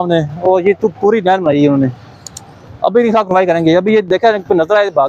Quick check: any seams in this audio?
no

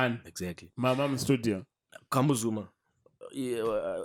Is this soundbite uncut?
yes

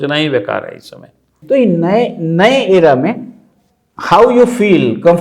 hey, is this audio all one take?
no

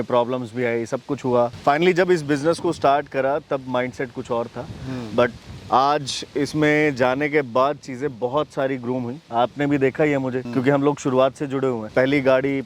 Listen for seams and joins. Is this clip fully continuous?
yes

